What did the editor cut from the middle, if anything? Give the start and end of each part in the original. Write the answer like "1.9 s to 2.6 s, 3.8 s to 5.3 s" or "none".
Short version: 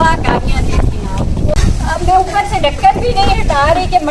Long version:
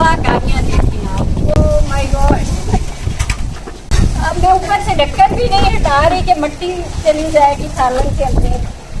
1.5 s to 3.9 s